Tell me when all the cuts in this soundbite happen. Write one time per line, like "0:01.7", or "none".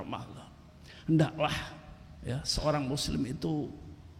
none